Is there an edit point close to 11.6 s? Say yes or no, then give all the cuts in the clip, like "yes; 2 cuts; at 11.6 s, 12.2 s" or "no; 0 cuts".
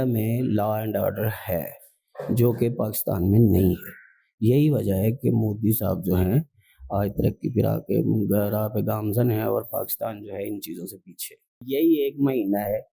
yes; 1 cut; at 11.6 s